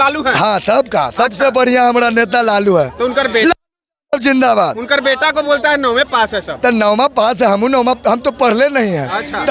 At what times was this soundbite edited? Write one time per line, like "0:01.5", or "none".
none